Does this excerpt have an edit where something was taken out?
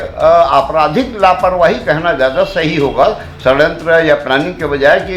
no; 0 cuts

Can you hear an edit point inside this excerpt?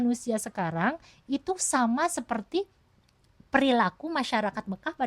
no; 0 cuts

